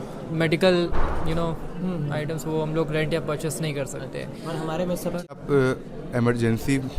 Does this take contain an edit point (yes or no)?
yes